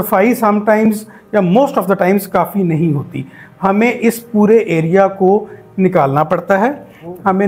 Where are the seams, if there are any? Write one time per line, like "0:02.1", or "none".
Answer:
none